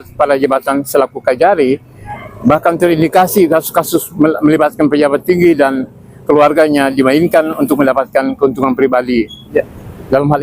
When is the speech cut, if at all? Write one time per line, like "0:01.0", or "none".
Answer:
0:09.5

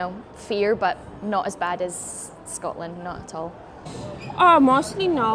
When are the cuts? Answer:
none

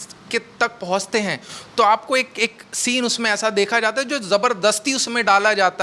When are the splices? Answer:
none

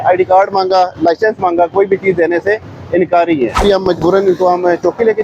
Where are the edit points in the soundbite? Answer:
0:03.6

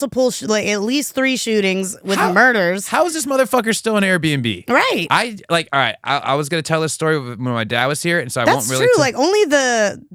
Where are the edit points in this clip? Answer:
none

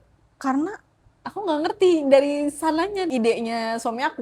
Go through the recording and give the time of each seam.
0:03.1

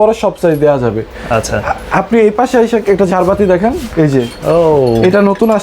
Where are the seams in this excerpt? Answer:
none

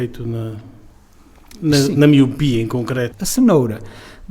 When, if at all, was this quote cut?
0:03.2

